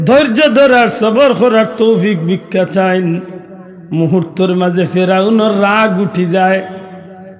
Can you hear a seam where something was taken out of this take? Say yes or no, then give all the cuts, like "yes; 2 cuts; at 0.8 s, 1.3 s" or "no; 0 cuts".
no; 0 cuts